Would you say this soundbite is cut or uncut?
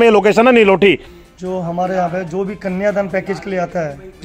cut